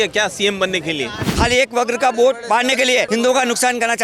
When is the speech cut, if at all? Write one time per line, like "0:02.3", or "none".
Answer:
0:01.2
0:03.1